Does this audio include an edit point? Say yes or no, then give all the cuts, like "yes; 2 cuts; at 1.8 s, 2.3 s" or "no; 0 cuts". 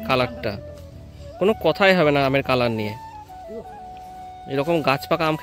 no; 0 cuts